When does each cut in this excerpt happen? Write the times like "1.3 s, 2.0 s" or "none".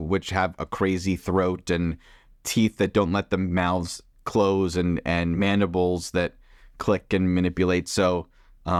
none